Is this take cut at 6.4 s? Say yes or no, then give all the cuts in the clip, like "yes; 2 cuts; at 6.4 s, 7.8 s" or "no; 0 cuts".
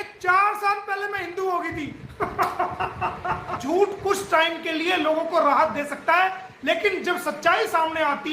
no; 1 cut; at 3.6 s